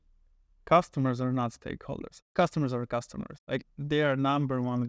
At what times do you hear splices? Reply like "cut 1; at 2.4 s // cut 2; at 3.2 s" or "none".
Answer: cut 1; at 2.2 s // cut 2; at 3.6 s